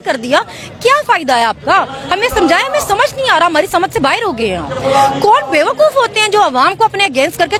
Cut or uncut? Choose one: uncut